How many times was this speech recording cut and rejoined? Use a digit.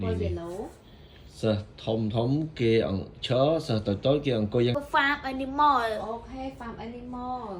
1